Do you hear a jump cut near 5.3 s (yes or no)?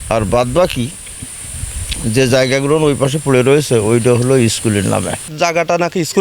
yes